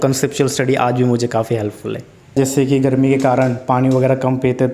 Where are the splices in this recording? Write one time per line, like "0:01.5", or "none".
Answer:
0:02.3